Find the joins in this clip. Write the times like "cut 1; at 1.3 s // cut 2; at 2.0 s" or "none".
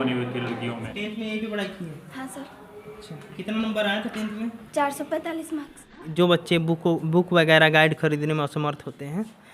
cut 1; at 0.9 s // cut 2; at 6.0 s